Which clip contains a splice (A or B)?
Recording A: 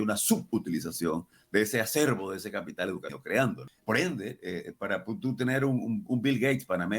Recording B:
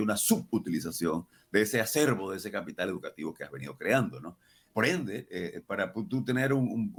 A